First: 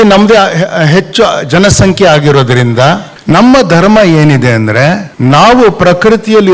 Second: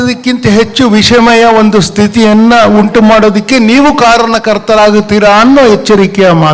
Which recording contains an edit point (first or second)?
first